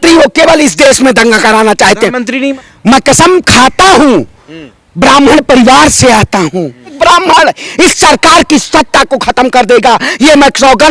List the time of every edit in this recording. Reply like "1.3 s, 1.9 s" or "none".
2.5 s, 7.0 s